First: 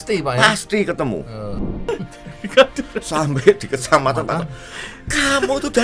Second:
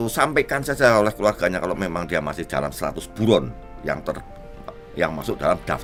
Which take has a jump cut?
first; 1 cut; at 1.7 s

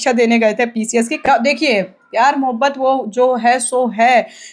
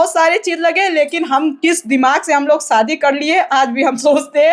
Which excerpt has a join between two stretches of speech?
first; 1 cut; at 1.2 s

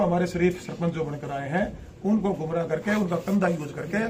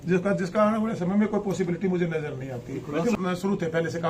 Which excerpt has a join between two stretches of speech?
second; 1 cut; at 3.1 s

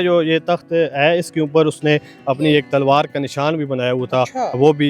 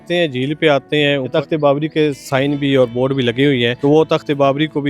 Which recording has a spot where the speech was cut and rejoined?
second; 2 cuts; at 1.3 s, 3.7 s

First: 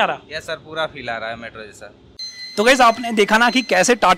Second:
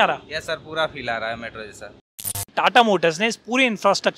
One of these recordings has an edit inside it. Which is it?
second; 1 cut; at 2.4 s

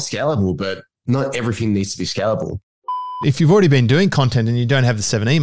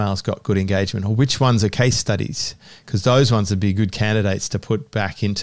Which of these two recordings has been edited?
first; 2 cuts; at 1.0 s, 2.7 s

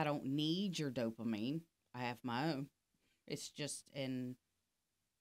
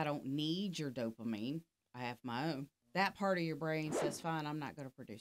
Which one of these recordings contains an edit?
second; 1 cut; at 2.8 s

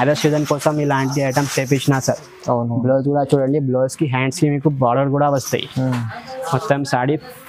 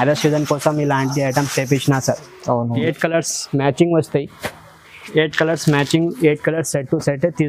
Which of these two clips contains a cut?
second; 1 cut; at 2.8 s

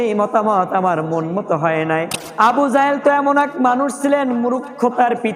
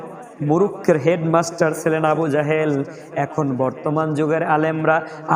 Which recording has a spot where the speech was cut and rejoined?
first; 1 cut; at 2.1 s

